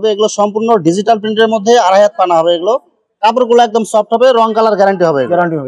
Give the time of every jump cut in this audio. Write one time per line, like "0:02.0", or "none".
none